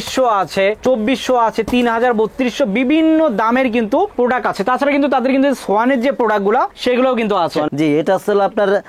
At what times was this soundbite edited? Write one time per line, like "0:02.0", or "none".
0:07.7